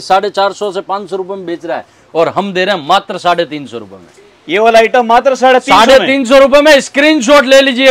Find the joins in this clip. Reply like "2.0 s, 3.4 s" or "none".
none